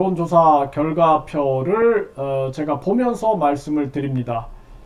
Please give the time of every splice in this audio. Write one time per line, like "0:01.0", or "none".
none